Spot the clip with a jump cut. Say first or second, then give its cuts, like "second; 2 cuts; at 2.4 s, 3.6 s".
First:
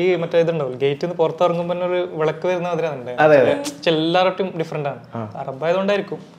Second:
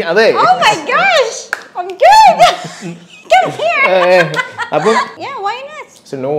second; 1 cut; at 5.1 s